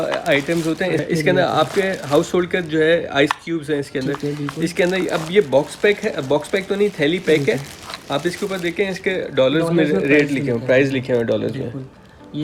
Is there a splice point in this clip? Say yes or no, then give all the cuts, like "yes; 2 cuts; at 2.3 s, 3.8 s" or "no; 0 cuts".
no; 0 cuts